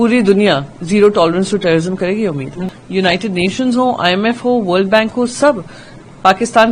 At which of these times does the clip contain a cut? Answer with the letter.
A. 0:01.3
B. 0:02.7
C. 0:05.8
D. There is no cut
B